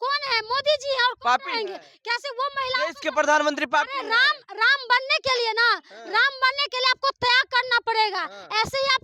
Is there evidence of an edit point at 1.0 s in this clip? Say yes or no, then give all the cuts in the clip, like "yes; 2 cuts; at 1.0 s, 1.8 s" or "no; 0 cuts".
no; 0 cuts